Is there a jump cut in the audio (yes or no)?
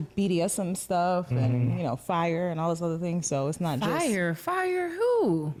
no